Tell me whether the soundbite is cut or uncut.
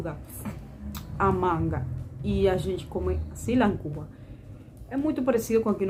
uncut